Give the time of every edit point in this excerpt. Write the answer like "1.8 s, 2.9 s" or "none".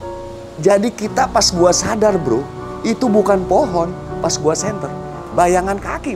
5.2 s